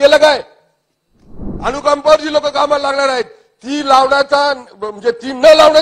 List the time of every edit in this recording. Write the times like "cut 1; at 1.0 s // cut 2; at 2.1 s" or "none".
cut 1; at 1.4 s